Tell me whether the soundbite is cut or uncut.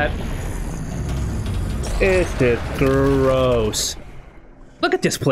uncut